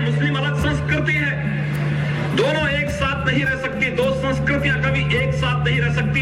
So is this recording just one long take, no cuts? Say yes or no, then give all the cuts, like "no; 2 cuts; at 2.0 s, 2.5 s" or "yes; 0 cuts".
yes; 0 cuts